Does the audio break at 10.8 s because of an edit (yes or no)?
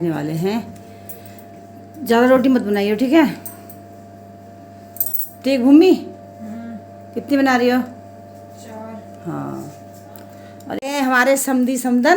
yes